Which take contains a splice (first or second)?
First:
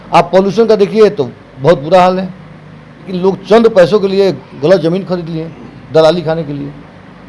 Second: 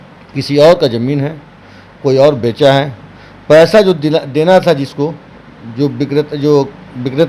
first